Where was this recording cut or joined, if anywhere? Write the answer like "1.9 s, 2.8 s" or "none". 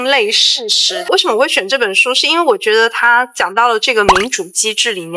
1.0 s